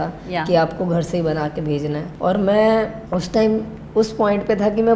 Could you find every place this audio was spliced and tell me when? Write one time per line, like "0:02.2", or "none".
0:02.1
0:03.0